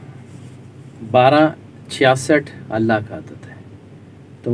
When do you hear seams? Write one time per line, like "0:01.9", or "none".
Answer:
none